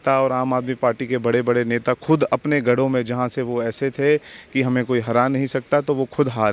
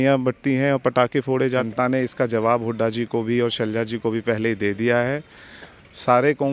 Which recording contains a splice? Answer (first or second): second